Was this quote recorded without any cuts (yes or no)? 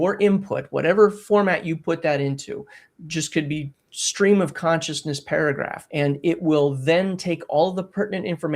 no